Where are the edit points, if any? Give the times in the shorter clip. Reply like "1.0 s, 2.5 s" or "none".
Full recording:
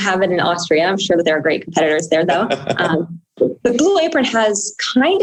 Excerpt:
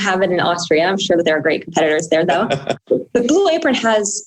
2.7 s

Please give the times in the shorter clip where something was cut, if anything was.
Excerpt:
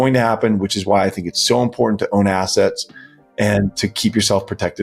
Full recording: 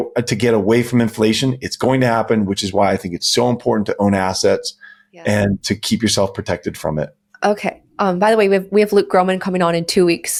none

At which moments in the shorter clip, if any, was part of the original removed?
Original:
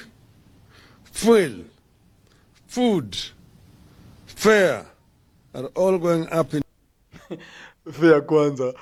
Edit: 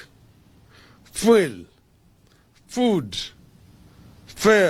none

